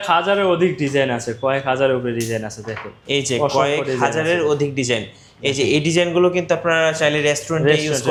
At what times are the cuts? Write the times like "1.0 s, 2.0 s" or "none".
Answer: none